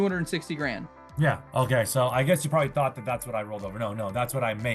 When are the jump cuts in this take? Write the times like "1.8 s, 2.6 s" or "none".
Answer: none